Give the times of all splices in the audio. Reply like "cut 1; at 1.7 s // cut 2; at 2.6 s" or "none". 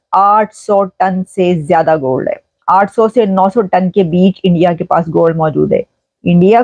none